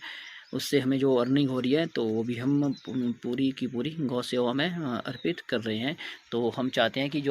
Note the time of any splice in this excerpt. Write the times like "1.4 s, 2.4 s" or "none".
none